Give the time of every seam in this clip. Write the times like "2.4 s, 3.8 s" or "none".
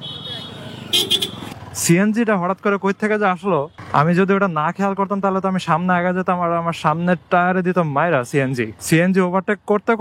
1.6 s, 3.8 s, 8.8 s